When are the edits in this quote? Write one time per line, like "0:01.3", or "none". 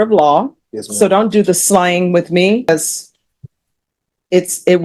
0:02.7

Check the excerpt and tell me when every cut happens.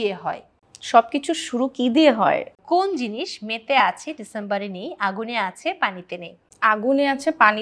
0:02.6
0:06.4

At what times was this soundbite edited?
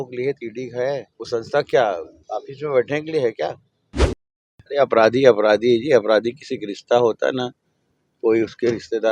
0:01.1
0:02.1
0:04.2

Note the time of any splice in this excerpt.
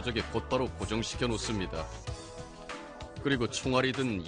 none

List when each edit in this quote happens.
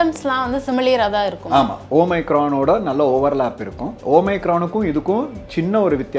none

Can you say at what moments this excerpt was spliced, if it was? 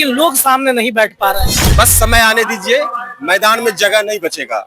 0:01.6

